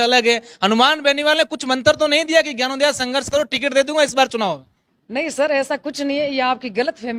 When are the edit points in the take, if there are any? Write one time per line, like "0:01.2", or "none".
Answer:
none

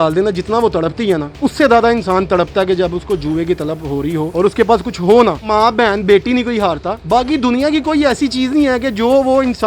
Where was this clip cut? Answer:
0:01.3
0:04.3

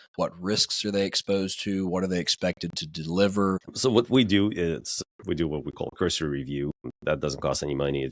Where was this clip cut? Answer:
0:03.7
0:05.0
0:06.9

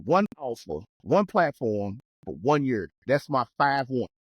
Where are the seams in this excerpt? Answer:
0:00.9

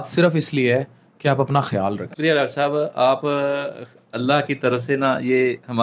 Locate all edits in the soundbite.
0:02.1

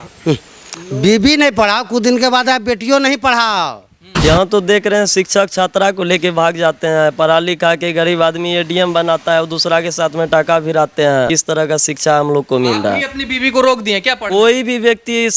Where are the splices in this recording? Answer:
0:04.2
0:11.3

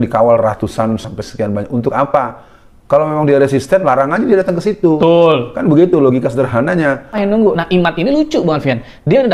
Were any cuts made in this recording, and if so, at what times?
0:07.2

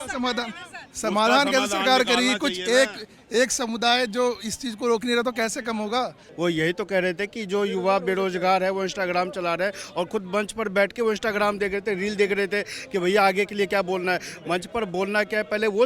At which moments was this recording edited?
0:06.2

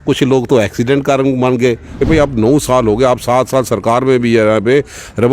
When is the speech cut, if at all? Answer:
0:02.0

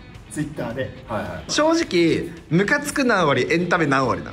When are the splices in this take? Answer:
0:01.5

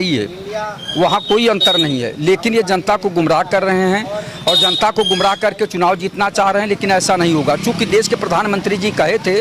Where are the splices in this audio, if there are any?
none

